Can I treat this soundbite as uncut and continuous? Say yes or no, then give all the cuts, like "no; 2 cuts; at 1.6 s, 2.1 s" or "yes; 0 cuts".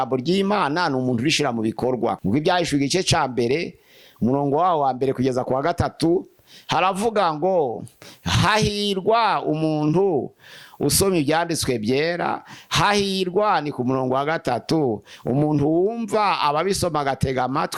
yes; 0 cuts